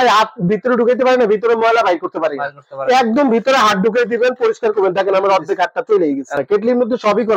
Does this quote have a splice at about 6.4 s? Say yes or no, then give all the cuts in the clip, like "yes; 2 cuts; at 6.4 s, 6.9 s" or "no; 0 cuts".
yes; 1 cut; at 6.4 s